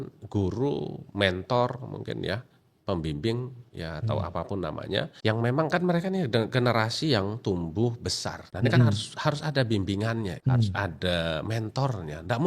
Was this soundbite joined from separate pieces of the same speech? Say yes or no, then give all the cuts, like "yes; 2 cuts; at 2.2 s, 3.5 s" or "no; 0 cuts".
yes; 3 cuts; at 5.1 s, 8.5 s, 10.4 s